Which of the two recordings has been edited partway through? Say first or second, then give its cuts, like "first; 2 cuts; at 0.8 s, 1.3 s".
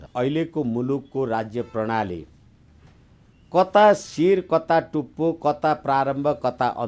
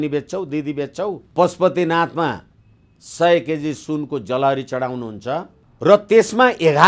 second; 2 cuts; at 1.2 s, 5.6 s